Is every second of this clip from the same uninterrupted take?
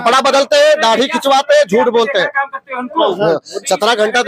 yes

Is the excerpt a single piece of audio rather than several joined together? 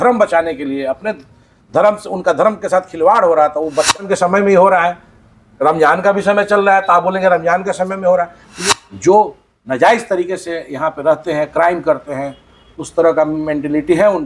no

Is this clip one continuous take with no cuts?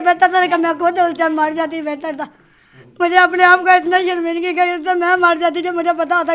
yes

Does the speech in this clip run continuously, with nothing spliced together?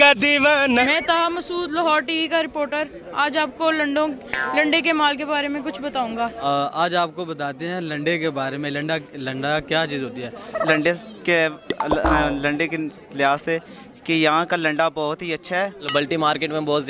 no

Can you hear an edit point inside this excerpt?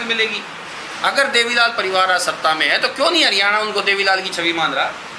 no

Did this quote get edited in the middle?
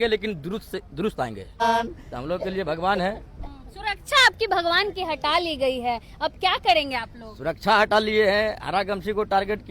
yes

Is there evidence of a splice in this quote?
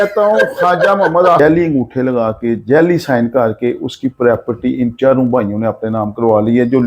yes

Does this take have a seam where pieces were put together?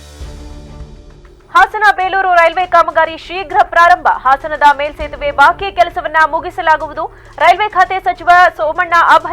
yes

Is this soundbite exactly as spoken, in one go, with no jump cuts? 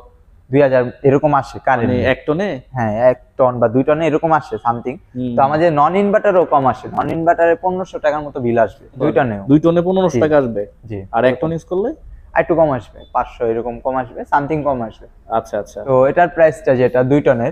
yes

